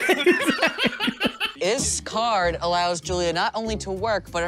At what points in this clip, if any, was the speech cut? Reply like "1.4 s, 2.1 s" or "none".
1.5 s